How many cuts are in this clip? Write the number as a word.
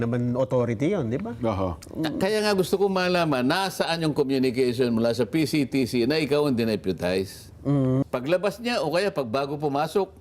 one